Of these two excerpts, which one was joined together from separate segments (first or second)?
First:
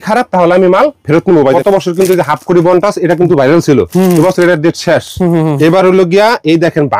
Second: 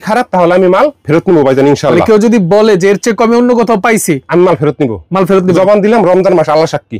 first